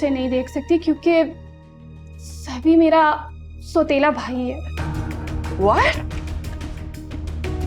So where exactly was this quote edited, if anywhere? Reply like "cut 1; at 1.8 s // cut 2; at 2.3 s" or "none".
none